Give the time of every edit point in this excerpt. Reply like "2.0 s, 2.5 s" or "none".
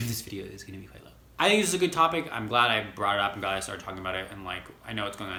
none